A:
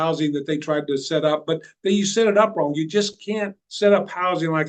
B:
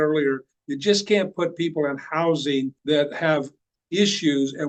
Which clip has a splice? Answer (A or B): A